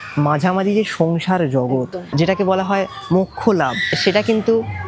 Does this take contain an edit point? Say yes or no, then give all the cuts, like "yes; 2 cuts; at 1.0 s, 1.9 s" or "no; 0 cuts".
yes; 2 cuts; at 2.1 s, 3.9 s